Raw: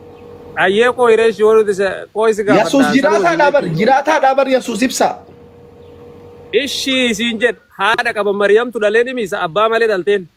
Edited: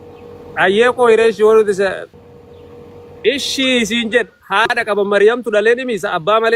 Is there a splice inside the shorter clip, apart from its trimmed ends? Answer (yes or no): yes